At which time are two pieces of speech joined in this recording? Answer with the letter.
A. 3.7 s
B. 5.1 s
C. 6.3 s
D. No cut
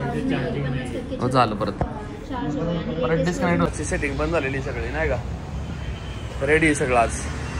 A